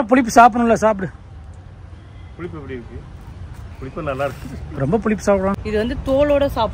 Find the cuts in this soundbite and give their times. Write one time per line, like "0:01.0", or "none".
0:05.5

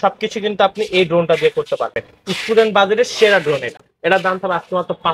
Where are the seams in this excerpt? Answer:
none

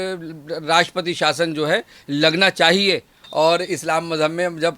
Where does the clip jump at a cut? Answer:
0:03.2

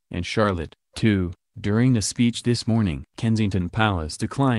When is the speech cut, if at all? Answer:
0:03.1

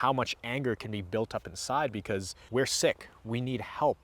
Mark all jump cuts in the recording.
0:02.4

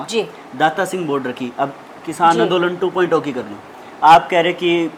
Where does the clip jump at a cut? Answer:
none

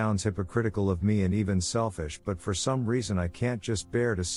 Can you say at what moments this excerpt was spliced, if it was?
none

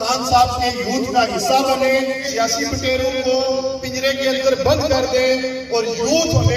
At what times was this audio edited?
0:02.2

